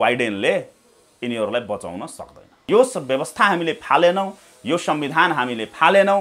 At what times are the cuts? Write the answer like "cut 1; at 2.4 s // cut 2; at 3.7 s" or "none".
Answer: cut 1; at 2.6 s